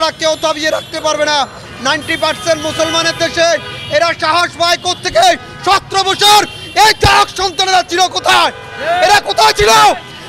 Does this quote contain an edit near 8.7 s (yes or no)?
no